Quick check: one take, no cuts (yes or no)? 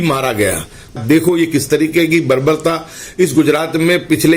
no